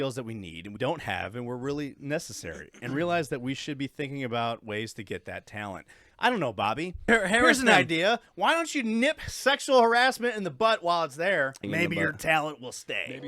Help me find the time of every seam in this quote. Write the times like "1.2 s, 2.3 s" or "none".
0.8 s, 7.1 s, 11.6 s